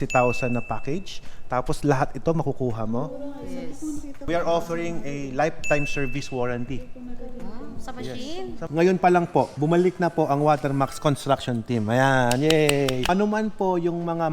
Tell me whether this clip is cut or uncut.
cut